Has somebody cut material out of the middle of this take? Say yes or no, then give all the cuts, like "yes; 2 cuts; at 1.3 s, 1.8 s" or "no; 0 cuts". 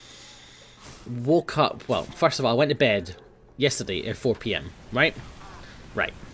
yes; 1 cut; at 4.7 s